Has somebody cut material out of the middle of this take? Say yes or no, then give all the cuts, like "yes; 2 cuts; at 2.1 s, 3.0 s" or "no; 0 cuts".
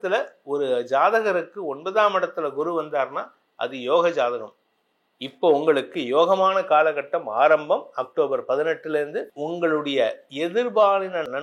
yes; 1 cut; at 9.3 s